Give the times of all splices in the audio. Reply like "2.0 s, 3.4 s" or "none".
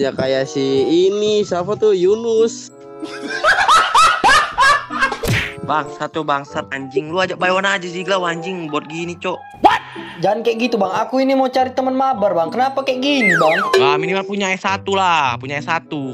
13.6 s